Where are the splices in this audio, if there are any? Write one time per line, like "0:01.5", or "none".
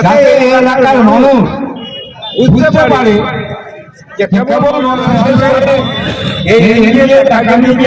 0:05.1